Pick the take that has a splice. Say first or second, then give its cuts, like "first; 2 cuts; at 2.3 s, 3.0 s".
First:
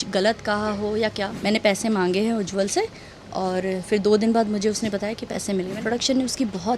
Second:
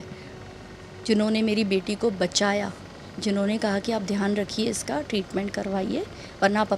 first; 2 cuts; at 1.3 s, 5.7 s